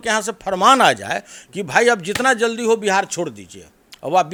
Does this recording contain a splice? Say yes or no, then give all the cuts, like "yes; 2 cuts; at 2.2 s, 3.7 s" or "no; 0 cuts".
no; 0 cuts